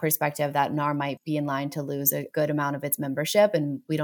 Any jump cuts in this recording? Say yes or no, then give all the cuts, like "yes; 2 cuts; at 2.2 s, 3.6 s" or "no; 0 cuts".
yes; 2 cuts; at 1.2 s, 2.3 s